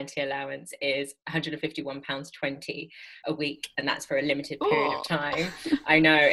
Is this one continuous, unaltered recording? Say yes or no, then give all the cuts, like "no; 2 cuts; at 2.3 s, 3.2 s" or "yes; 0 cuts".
no; 2 cuts; at 1.2 s, 3.1 s